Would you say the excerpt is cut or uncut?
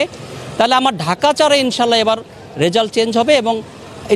uncut